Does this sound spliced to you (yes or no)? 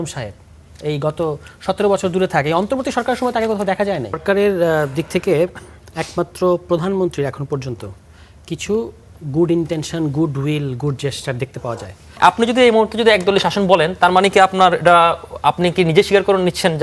yes